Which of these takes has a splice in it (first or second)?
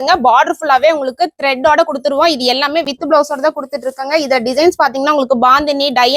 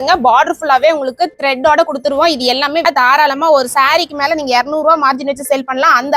second